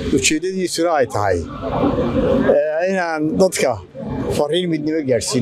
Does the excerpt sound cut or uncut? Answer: uncut